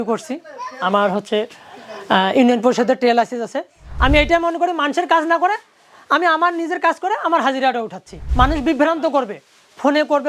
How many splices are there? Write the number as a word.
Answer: two